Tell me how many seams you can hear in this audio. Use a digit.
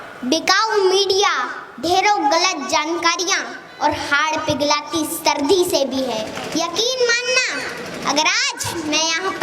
1